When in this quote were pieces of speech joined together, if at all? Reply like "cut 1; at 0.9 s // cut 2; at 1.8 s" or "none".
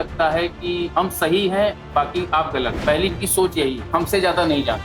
cut 1; at 0.9 s // cut 2; at 2.8 s // cut 3; at 3.9 s